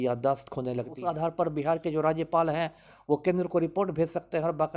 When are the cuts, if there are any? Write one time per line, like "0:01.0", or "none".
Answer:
0:00.9